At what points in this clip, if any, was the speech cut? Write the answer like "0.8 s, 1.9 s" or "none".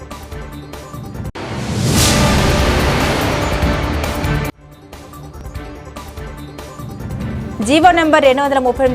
1.3 s, 7.3 s